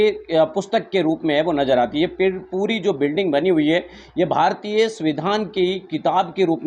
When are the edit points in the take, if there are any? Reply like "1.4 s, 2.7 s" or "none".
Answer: none